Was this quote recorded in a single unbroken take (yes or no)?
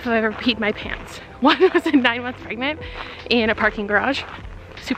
yes